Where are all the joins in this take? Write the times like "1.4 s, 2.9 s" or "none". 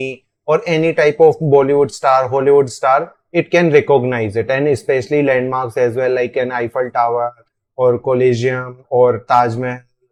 none

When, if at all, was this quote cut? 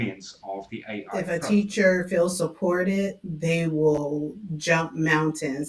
1.1 s

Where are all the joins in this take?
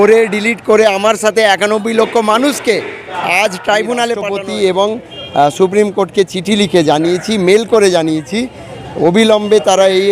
4.3 s

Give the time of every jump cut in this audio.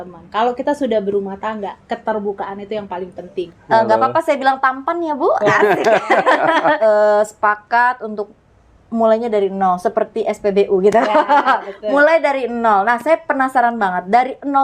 3.4 s, 6.8 s

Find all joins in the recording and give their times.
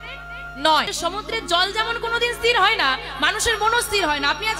0.9 s

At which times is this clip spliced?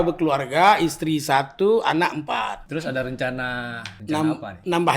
2.6 s, 3.8 s

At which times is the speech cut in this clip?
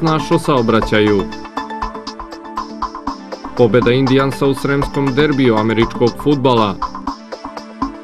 none

